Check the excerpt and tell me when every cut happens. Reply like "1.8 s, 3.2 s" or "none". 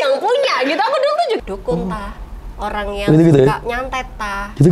1.4 s